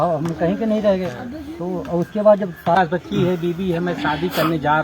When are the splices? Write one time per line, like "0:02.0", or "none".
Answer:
0:02.8